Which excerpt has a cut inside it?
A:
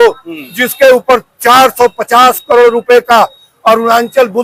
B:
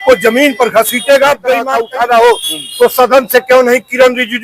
B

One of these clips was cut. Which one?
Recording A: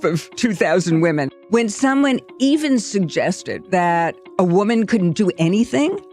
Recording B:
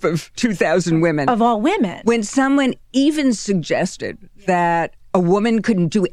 A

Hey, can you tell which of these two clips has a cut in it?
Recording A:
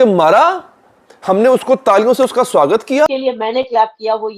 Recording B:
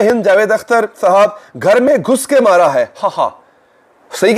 A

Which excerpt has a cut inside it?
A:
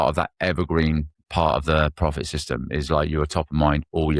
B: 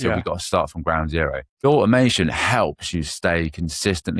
B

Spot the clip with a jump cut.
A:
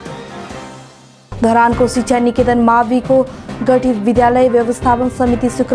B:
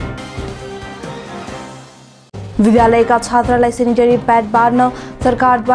A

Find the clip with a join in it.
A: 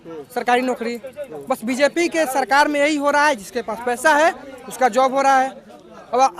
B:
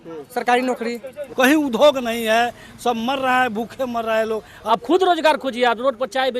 B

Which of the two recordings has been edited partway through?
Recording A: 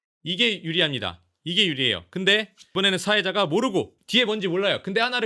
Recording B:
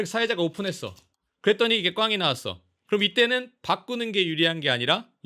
A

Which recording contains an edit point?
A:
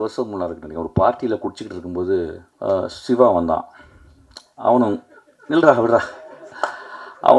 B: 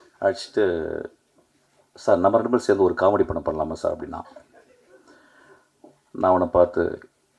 A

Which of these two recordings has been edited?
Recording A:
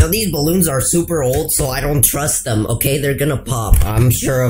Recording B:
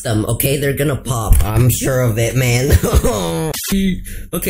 B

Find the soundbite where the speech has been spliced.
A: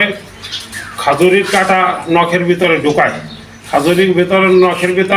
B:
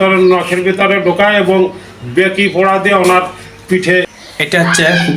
B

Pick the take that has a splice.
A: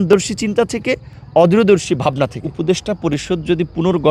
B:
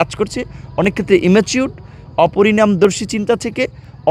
A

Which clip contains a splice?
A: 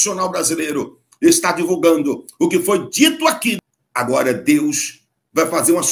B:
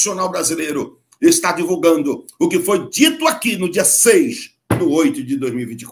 A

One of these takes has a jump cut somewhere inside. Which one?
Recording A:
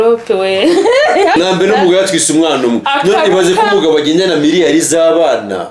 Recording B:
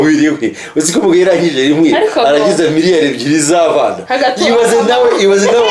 A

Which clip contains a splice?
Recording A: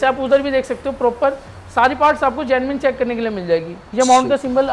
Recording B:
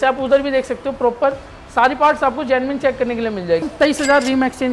B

